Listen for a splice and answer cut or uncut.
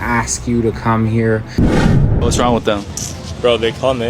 cut